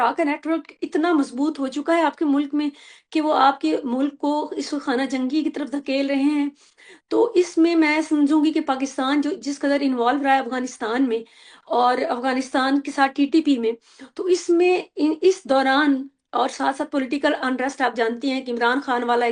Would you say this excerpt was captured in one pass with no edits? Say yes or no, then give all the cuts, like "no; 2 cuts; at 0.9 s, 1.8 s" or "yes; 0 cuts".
yes; 0 cuts